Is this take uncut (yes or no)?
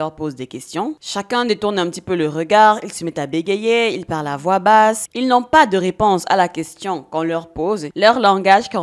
no